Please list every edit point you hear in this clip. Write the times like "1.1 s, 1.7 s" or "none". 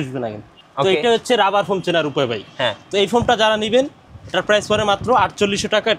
none